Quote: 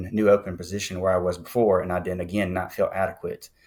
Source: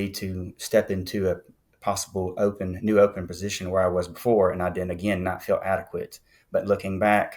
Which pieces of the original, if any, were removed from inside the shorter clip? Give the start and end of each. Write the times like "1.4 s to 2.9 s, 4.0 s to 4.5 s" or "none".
none

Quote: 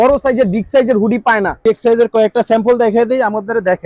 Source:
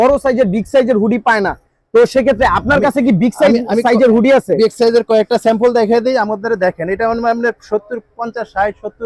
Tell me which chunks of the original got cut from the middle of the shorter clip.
1.6 s to 4.6 s

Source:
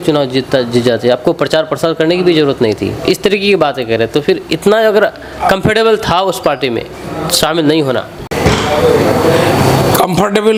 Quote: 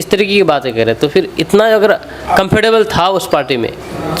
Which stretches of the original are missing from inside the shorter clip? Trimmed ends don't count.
none

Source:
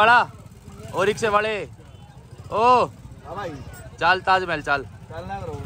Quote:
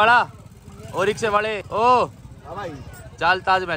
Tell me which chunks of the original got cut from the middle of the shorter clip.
1.6 s to 2.4 s

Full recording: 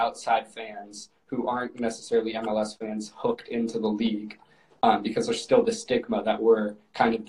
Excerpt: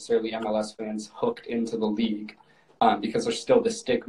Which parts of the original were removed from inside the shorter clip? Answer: none

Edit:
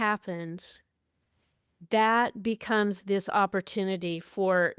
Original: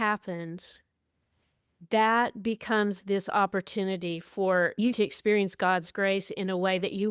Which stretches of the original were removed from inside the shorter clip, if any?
none

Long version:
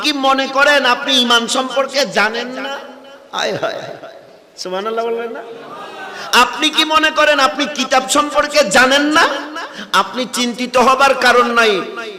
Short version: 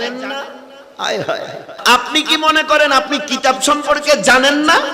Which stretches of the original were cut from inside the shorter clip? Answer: 4.0 s to 6.2 s

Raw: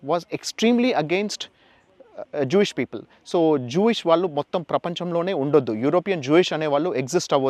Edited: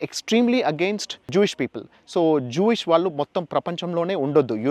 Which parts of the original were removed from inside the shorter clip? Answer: 1.6 s to 2.5 s

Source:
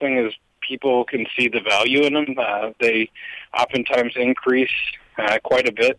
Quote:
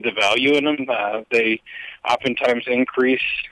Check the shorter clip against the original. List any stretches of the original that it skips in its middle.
none

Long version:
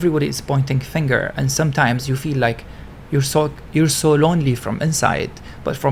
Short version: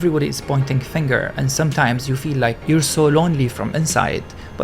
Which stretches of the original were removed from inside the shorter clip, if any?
2.6 s to 3.7 s

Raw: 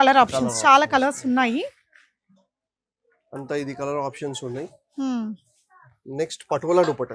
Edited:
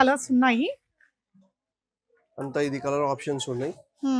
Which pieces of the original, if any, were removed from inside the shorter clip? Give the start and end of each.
none

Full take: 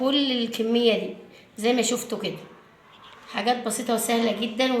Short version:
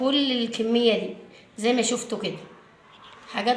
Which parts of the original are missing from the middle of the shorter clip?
none

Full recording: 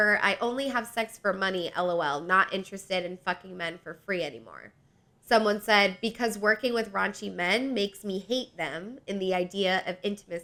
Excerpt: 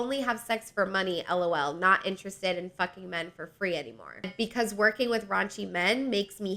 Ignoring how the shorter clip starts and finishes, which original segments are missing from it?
4.8 s to 6.0 s

